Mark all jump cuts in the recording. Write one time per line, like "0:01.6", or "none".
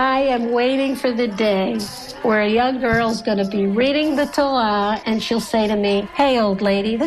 0:05.0
0:06.1